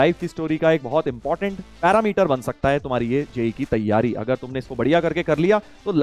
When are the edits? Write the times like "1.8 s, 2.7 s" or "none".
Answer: none